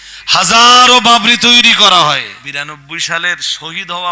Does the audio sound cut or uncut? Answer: cut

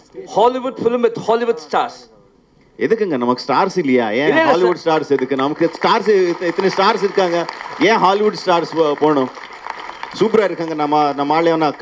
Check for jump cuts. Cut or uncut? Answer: uncut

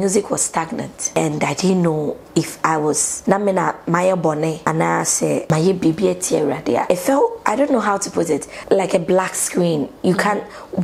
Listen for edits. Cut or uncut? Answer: cut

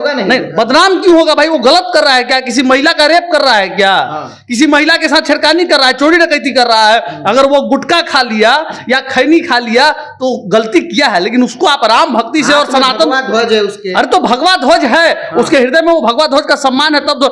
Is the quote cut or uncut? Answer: uncut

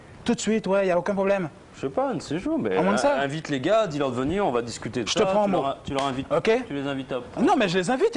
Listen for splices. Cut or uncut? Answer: cut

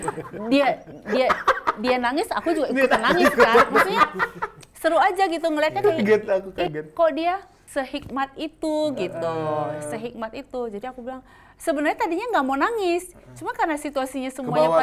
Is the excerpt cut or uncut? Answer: cut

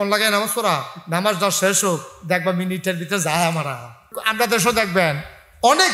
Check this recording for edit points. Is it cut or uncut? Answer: cut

